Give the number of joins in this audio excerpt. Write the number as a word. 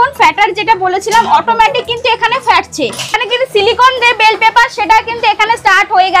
one